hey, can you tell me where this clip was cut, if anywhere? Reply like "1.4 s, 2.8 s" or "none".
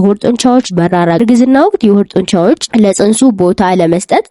1.2 s